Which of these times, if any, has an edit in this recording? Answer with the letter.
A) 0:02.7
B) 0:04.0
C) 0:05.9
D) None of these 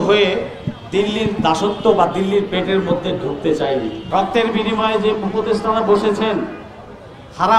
B